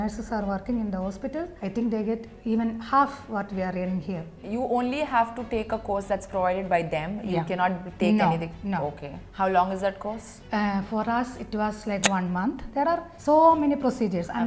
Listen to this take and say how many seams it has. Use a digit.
3